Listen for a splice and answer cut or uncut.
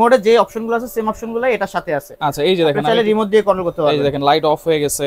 uncut